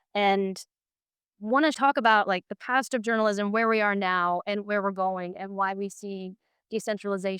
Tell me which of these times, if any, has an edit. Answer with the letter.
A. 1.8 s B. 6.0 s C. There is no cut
A